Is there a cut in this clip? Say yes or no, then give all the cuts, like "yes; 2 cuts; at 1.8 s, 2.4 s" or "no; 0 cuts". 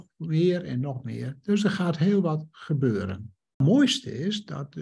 yes; 1 cut; at 3.6 s